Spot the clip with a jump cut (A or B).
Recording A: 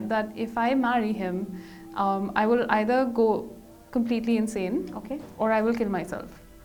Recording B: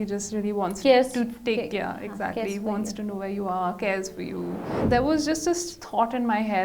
B